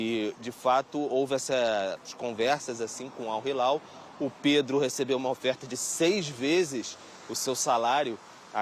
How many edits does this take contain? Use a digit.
0